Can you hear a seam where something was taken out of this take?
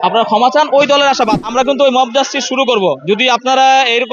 yes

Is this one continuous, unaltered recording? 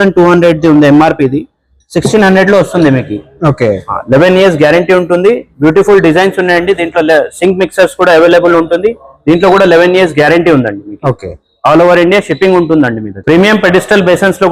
yes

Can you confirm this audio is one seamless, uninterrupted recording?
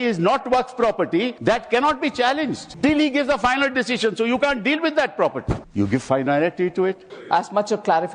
no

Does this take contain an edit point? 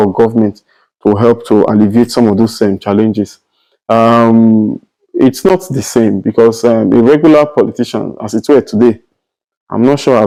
no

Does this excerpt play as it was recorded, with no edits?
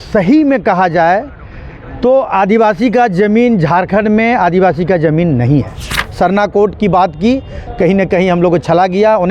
no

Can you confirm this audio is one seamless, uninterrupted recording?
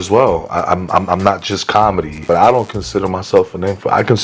no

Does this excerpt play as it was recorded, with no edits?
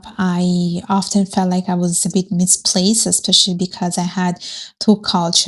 yes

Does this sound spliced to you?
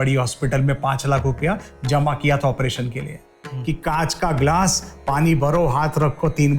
yes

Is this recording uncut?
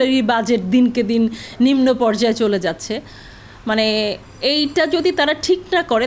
yes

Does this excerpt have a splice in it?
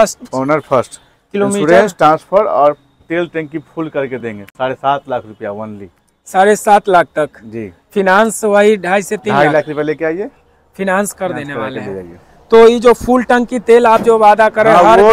no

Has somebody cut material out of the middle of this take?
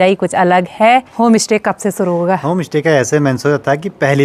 yes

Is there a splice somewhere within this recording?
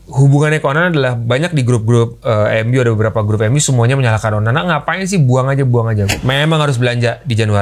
yes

